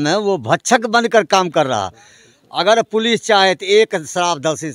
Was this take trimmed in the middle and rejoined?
no; 0 cuts

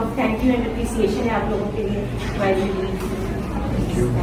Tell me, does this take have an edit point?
no; 0 cuts

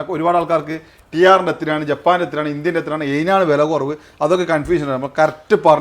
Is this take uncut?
yes; 0 cuts

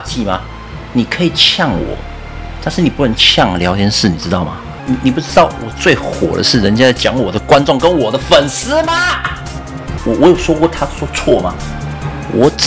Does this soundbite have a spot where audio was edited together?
yes; 2 cuts; at 4.7 s, 10.0 s

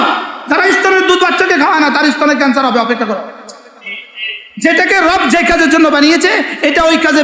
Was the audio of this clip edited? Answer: no; 0 cuts

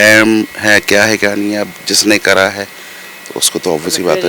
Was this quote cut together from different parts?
no; 0 cuts

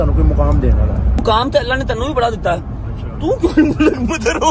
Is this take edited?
yes; 1 cut; at 1.2 s

